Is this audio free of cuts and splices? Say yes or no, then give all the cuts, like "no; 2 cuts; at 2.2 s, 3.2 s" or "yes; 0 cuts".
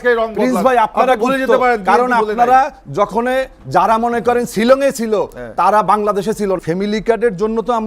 no; 1 cut; at 6.6 s